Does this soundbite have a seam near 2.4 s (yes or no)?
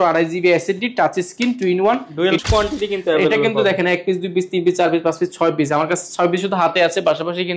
yes